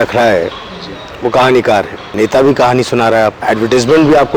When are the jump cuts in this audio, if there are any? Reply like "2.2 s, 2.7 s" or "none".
2.0 s, 3.4 s